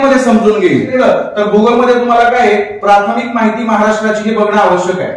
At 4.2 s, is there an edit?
no; 1 cut; at 0.9 s

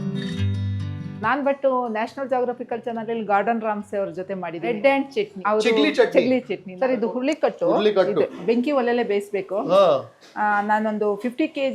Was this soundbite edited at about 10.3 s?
no; 3 cuts; at 5.4 s, 6.6 s, 8.3 s

